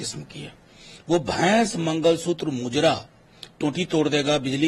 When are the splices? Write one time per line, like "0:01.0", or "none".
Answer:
none